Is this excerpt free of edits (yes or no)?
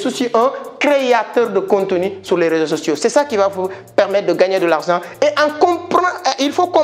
yes